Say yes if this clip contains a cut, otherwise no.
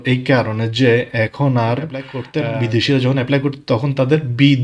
yes